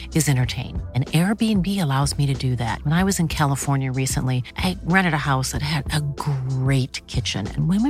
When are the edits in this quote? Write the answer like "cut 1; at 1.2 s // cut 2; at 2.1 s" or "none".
none